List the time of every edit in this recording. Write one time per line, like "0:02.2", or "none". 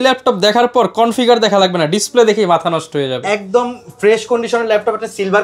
none